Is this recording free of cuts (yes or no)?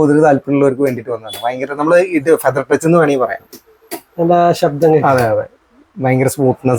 yes